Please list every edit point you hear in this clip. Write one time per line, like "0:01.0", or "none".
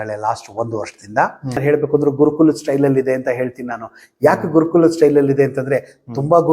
0:01.6